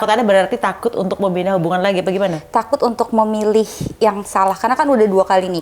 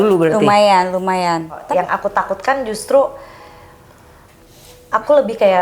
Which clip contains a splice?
second; 1 cut; at 1.6 s

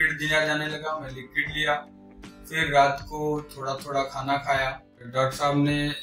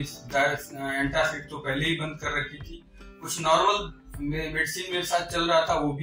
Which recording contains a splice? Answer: first; 1 cut; at 5.0 s

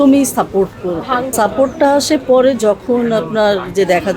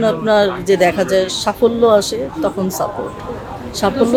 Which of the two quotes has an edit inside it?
first; 1 cut; at 1.3 s

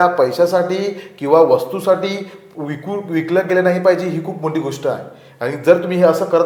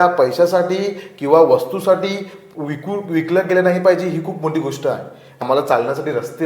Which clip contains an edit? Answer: second; 1 cut; at 5.4 s

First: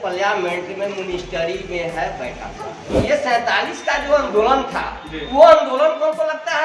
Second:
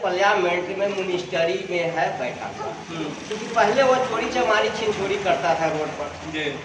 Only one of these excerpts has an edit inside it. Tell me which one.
first; 1 cut; at 2.9 s

